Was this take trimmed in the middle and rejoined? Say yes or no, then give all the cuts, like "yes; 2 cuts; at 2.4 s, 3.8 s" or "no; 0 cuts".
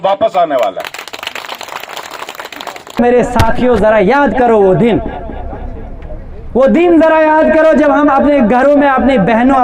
yes; 1 cut; at 3.0 s